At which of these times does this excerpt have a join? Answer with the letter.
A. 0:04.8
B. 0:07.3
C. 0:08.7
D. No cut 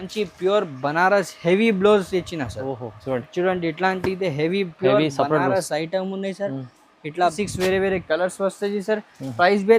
B